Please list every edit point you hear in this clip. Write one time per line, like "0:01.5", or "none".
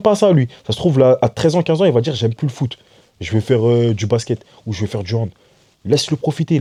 none